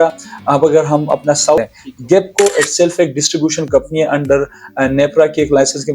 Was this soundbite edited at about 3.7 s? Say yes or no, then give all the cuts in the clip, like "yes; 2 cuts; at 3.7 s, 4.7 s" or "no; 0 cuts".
no; 1 cut; at 1.6 s